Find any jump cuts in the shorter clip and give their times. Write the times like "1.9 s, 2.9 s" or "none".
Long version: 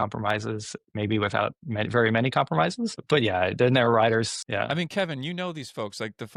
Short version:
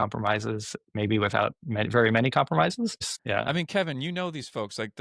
3.0 s